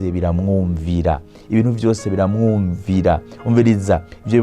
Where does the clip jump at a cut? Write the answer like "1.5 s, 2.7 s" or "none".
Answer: none